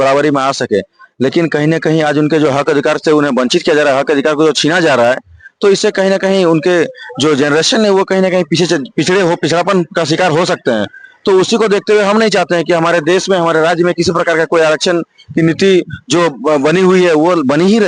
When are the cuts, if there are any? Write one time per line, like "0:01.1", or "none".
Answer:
none